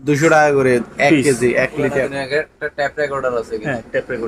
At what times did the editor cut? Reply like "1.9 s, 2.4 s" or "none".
none